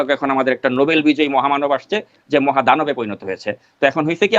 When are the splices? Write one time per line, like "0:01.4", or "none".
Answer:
none